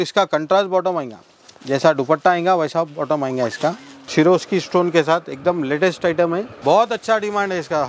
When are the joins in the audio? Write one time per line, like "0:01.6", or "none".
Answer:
0:03.9
0:06.5